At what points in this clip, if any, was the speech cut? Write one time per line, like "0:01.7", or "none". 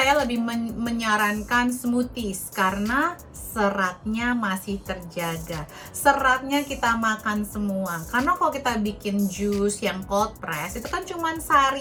none